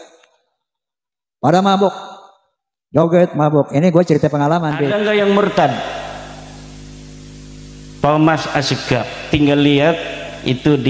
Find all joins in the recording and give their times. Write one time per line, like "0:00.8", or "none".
0:04.9